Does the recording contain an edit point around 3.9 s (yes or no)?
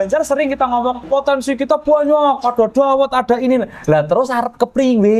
no